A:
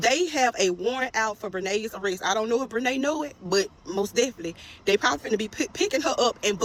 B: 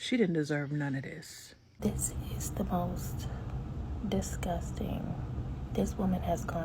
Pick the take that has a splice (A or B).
B